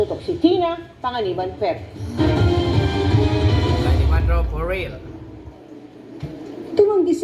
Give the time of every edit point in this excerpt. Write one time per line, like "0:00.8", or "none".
0:01.3
0:03.5

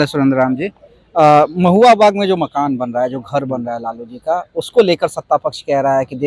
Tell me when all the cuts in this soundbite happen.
none

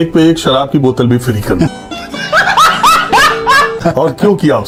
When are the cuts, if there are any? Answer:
none

